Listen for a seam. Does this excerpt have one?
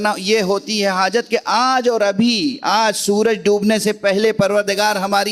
no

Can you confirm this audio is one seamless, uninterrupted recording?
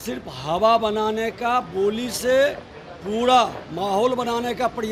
yes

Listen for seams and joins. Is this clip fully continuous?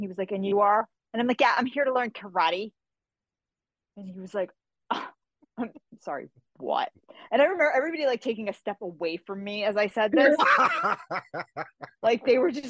yes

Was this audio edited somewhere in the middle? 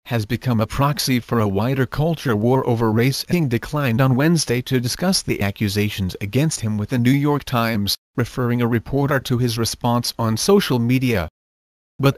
no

